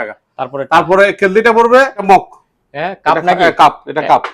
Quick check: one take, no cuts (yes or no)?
no